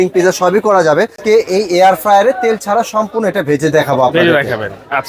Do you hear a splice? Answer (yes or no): yes